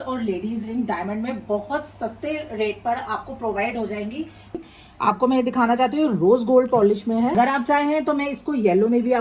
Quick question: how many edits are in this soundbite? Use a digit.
2